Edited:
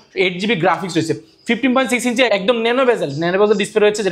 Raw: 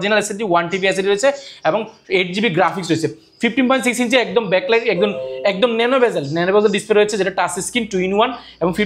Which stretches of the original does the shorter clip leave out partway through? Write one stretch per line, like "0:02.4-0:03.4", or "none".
0:04.2-0:05.4